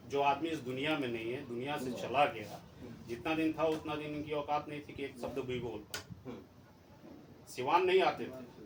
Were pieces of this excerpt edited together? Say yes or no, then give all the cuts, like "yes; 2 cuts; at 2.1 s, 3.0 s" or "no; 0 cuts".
no; 0 cuts